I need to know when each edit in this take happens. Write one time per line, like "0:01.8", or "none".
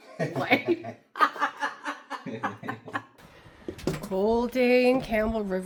none